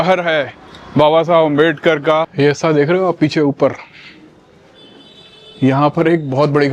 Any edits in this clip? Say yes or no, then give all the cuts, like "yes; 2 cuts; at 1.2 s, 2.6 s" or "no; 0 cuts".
yes; 1 cut; at 2.3 s